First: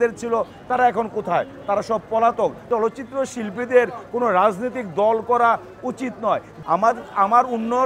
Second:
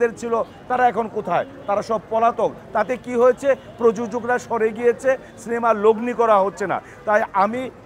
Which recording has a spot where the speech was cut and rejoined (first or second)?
first